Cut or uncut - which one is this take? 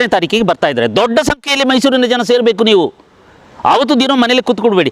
uncut